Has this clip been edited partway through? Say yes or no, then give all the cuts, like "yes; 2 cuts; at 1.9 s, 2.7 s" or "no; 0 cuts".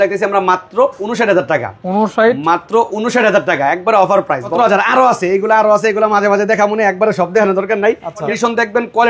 yes; 2 cuts; at 4.5 s, 8.3 s